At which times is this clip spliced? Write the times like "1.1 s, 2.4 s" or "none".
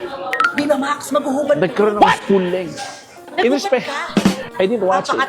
none